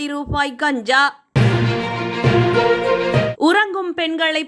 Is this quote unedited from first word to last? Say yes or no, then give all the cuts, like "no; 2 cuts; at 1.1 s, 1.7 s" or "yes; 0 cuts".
yes; 0 cuts